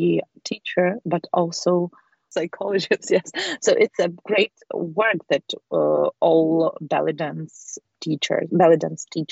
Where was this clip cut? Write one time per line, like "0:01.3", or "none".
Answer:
0:07.9